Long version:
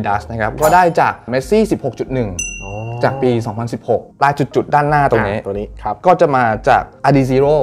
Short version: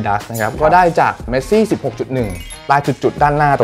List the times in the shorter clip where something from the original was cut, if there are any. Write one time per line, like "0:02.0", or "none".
0:02.6